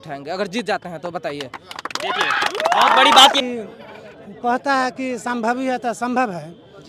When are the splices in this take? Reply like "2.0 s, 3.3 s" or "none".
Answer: 3.4 s